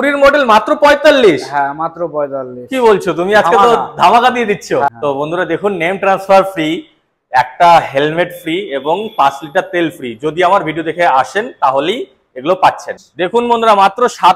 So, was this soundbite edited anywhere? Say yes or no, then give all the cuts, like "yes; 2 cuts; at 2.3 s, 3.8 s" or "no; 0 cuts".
yes; 2 cuts; at 4.9 s, 12.9 s